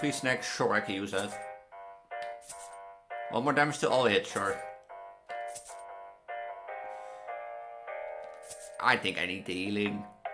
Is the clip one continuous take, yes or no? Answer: yes